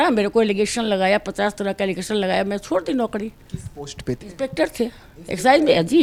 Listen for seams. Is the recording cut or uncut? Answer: uncut